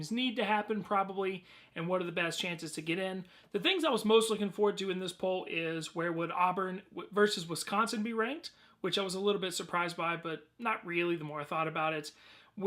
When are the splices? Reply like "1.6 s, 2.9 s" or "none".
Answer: 7.5 s